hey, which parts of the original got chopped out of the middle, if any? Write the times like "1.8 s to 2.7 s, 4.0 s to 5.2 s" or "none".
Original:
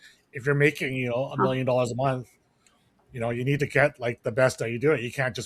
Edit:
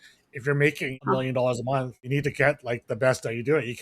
1.0 s to 1.3 s, 2.4 s to 3.4 s